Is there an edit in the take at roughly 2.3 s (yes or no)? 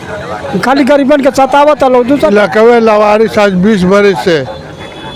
yes